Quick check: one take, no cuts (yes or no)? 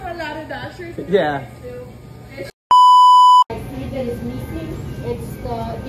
no